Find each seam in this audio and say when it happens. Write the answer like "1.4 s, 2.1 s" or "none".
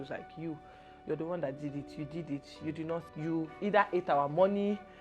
3.1 s